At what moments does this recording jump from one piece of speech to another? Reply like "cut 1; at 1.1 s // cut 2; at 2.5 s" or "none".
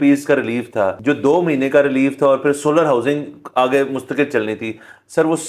cut 1; at 1.0 s